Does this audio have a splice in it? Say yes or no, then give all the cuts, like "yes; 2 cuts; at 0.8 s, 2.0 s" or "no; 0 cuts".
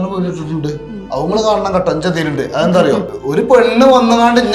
yes; 1 cut; at 3.1 s